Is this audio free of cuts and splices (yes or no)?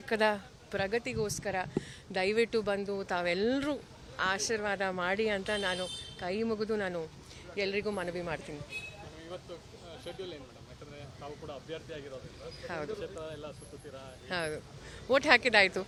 yes